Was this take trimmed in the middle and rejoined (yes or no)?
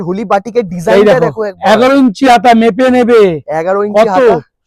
no